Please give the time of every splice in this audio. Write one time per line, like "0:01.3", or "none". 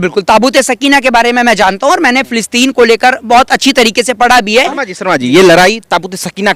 0:04.8